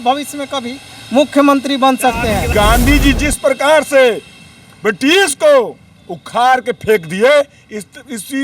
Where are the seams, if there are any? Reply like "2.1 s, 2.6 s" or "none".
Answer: 2.5 s